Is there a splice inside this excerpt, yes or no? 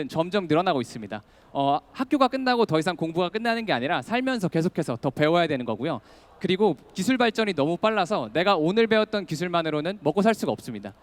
no